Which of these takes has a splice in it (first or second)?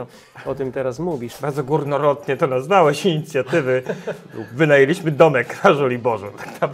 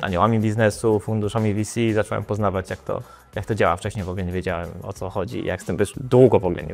first